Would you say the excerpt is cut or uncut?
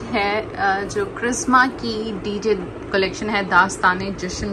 uncut